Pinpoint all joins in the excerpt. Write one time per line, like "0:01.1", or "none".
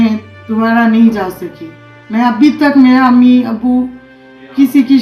none